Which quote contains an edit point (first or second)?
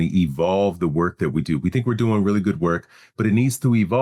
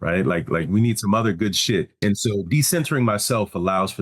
second